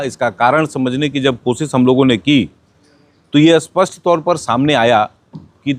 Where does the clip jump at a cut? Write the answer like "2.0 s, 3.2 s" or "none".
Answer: none